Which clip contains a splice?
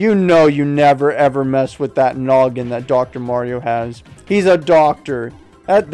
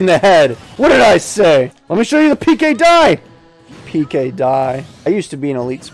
second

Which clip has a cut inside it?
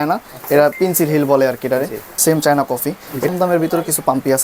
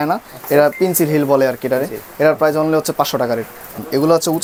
first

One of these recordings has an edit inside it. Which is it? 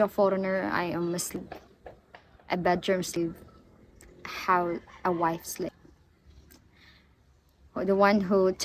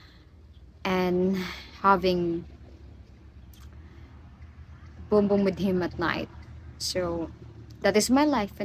first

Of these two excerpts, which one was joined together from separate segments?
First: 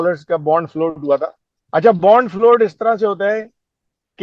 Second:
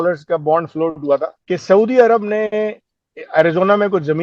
second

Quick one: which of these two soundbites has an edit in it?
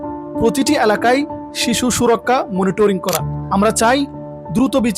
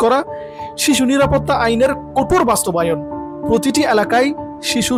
first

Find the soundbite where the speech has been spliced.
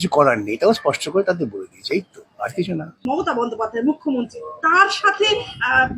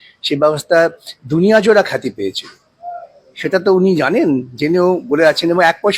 first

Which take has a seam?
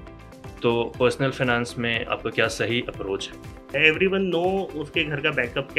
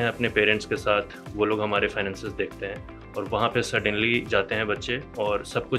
first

